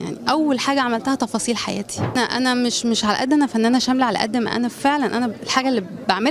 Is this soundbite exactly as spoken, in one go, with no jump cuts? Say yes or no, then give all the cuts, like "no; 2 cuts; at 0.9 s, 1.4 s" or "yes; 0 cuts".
no; 1 cut; at 2.2 s